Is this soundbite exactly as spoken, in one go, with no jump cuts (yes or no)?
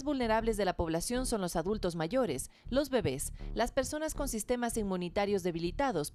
yes